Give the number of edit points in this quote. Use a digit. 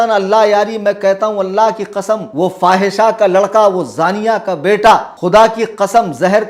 2